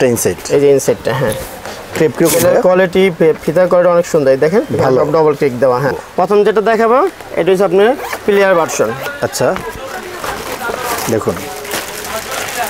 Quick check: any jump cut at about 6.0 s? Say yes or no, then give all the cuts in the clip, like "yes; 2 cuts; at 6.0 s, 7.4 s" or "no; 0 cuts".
yes; 1 cut; at 6.0 s